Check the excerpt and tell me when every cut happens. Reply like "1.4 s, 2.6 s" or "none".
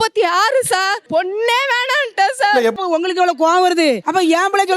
2.8 s